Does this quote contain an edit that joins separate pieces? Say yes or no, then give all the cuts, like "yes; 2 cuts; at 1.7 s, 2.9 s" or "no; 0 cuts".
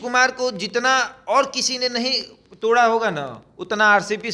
no; 0 cuts